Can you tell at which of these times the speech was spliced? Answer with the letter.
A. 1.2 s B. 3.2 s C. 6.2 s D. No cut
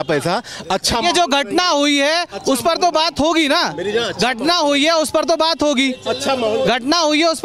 D